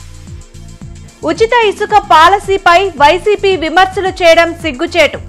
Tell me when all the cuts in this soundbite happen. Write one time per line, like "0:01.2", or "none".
0:00.9